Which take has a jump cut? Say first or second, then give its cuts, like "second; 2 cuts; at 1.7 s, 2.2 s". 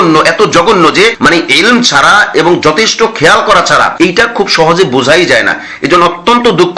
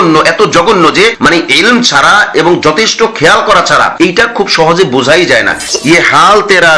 second; 1 cut; at 5.6 s